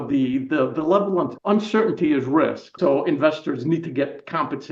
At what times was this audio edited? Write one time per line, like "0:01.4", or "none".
0:01.4
0:02.7